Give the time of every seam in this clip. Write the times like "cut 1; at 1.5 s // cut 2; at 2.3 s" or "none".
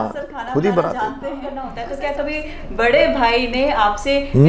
cut 1; at 1.7 s